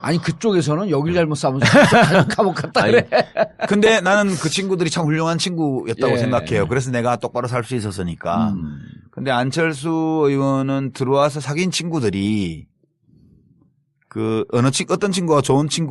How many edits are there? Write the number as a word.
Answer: zero